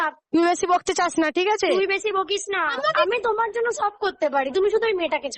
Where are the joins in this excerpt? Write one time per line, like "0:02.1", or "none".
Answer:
0:02.7